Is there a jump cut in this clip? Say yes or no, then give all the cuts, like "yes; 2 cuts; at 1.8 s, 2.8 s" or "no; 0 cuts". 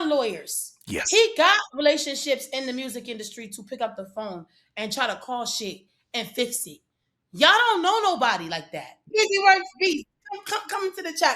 yes; 1 cut; at 9.1 s